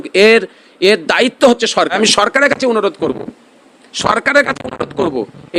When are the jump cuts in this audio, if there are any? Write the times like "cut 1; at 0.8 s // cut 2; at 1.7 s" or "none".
cut 1; at 1.9 s